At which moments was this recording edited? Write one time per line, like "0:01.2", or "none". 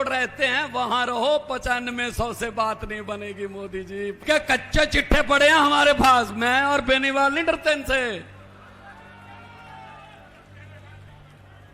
0:04.2